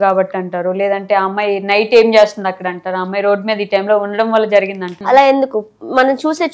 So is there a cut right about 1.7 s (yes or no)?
no